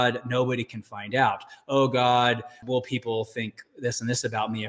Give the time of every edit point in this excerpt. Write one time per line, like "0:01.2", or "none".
0:02.5

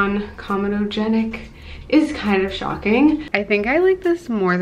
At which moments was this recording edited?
0:03.3

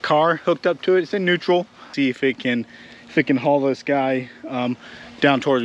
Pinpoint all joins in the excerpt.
0:01.9

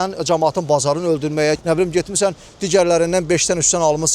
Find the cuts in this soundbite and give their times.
0:01.6

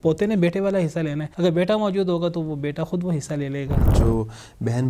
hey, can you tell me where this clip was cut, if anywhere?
0:01.2
0:03.9

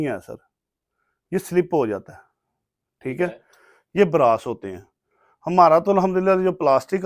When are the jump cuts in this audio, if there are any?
none

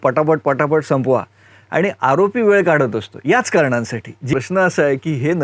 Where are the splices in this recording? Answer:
0:04.3

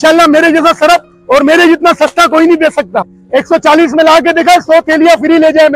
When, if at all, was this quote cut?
0:03.2

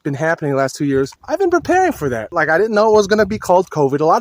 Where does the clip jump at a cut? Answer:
0:01.2
0:02.3

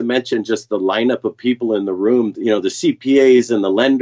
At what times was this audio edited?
none

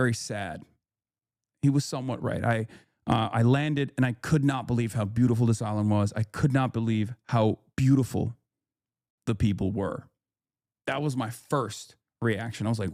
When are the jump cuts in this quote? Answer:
none

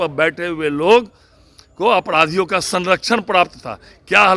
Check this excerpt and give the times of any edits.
none

